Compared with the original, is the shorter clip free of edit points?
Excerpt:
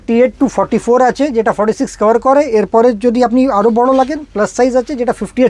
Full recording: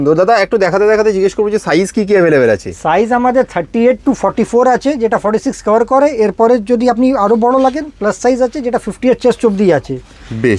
yes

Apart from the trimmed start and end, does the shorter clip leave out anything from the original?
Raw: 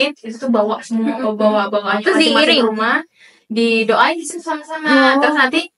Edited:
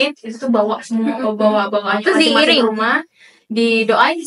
no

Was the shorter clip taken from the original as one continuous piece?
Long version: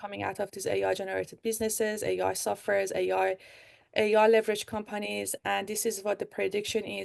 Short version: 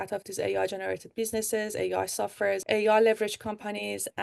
no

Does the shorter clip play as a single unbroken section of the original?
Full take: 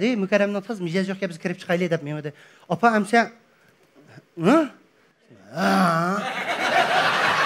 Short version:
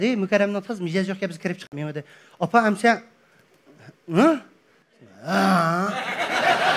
no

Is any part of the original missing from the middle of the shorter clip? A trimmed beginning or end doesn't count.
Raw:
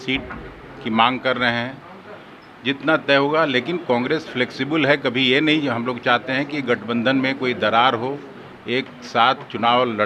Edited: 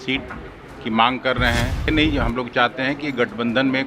yes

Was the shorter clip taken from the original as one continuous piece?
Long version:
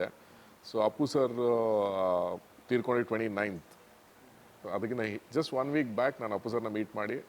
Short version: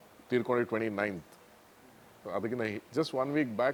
yes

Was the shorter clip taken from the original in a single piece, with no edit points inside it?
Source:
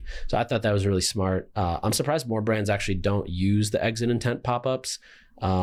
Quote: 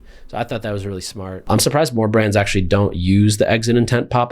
no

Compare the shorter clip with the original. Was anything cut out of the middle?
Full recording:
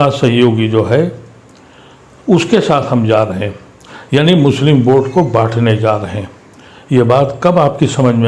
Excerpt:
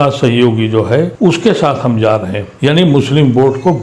yes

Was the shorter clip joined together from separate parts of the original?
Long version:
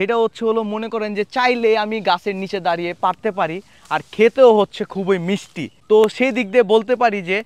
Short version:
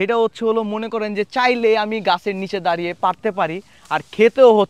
no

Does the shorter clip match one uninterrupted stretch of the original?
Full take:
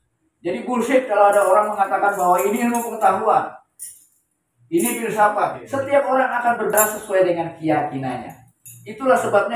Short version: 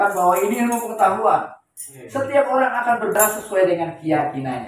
no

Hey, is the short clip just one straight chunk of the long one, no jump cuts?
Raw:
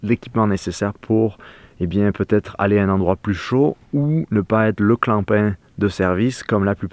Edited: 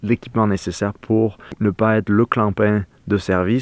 no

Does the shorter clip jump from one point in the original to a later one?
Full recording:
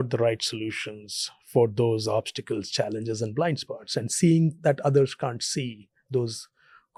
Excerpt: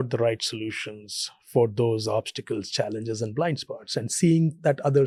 no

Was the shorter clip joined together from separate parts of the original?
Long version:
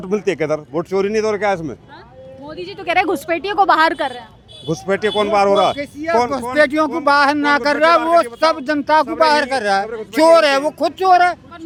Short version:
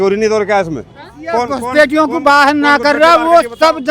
yes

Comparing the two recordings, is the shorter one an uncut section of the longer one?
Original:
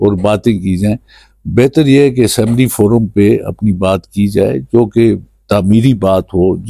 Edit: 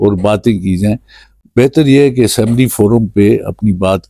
yes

